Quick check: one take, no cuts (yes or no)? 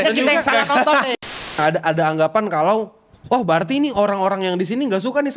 no